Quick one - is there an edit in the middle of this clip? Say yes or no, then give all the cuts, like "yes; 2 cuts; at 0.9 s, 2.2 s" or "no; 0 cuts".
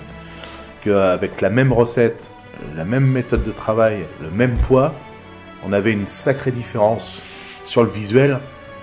no; 0 cuts